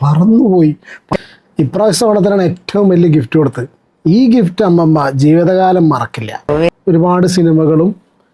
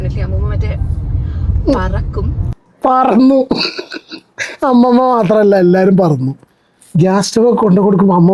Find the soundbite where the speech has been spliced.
first; 2 cuts; at 1.1 s, 6.7 s

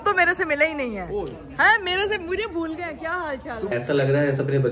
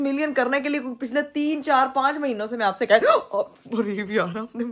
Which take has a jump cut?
first; 1 cut; at 3.7 s

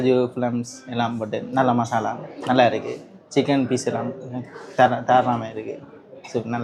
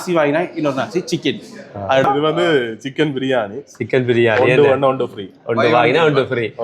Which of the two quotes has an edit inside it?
second; 1 cut; at 2.0 s

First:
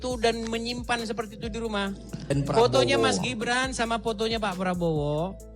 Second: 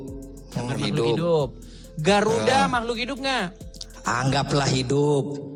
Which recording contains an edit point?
first; 1 cut; at 2.2 s

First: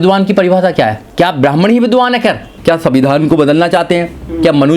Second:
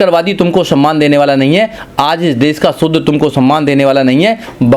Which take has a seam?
first; 2 cuts; at 1.0 s, 2.5 s

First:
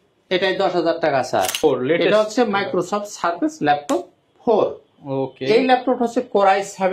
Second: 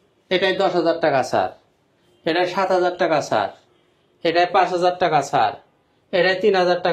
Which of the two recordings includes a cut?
first; 1 cut; at 1.6 s

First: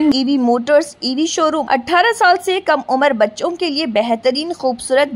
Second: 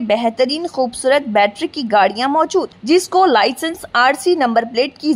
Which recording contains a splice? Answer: first; 1 cut; at 1.6 s

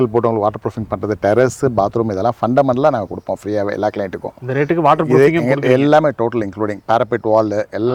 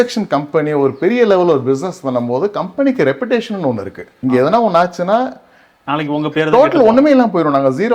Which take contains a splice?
second; 1 cut; at 4.2 s

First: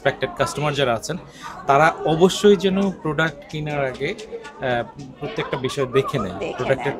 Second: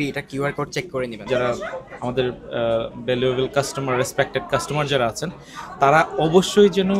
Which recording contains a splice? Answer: second; 1 cut; at 1.2 s

